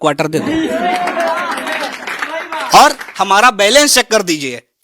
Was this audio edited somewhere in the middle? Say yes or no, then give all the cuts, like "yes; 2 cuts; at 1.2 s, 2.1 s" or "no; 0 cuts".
yes; 1 cut; at 3.1 s